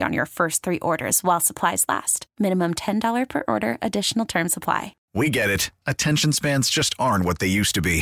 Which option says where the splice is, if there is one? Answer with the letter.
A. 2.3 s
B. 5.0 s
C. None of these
B